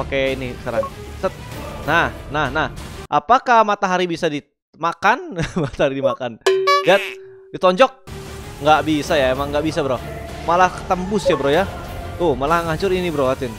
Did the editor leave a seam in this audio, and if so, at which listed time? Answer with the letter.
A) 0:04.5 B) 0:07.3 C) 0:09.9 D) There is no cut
D